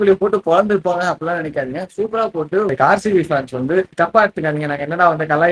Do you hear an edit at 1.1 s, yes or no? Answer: no